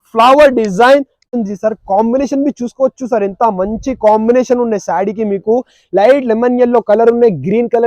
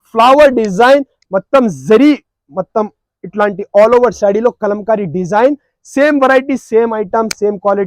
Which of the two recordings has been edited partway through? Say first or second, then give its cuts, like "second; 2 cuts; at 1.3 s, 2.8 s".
first; 1 cut; at 1.3 s